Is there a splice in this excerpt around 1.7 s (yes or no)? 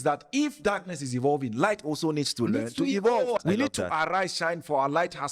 no